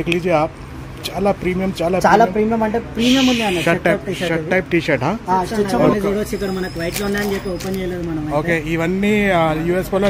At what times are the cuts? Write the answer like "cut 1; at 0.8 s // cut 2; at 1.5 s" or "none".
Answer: cut 1; at 5.9 s